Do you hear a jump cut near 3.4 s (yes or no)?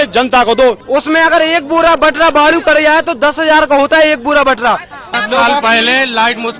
no